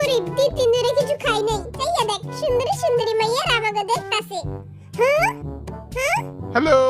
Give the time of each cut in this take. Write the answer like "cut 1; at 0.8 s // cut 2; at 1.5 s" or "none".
cut 1; at 1.8 s